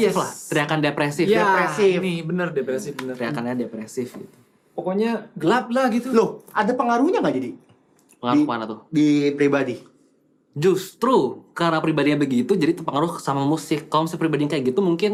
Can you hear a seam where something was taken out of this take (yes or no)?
no